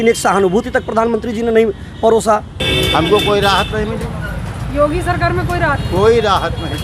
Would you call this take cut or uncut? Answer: uncut